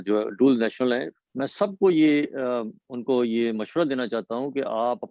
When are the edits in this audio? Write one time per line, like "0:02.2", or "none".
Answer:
0:01.2